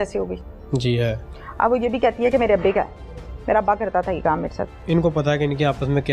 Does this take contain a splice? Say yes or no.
yes